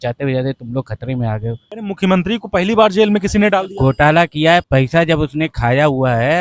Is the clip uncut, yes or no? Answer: no